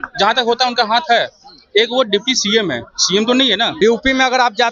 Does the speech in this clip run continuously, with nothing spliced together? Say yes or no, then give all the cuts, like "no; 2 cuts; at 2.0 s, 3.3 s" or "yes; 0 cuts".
no; 1 cut; at 3.8 s